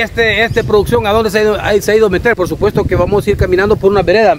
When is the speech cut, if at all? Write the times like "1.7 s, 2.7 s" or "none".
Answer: 2.3 s